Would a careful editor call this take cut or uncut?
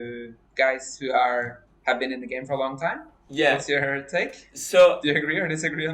uncut